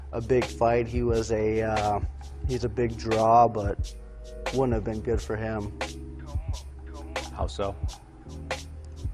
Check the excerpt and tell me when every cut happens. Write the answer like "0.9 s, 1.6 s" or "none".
5.5 s